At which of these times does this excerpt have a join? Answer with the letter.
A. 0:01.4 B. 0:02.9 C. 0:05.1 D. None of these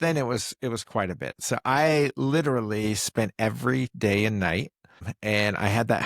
C